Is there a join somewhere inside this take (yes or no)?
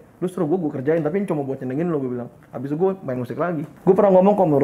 yes